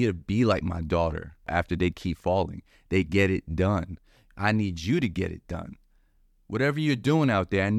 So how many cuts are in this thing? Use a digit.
1